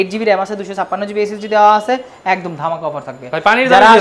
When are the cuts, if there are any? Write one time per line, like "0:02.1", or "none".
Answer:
none